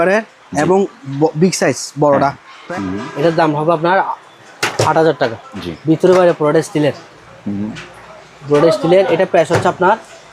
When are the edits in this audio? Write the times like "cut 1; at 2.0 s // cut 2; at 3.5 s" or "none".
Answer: cut 1; at 2.5 s // cut 2; at 5.5 s